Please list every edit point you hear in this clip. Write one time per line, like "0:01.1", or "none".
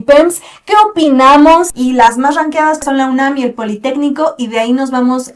0:01.7
0:02.8